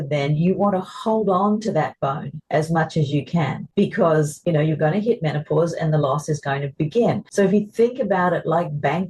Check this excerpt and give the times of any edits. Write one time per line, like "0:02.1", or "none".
0:03.6
0:04.4
0:07.2